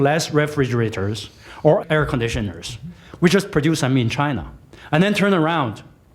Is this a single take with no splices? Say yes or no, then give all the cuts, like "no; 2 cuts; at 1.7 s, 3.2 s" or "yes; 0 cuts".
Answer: no; 1 cut; at 1.8 s